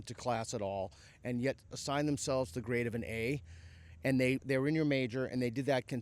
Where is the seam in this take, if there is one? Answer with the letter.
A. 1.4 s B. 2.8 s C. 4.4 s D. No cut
C